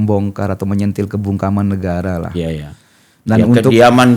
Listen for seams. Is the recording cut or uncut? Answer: uncut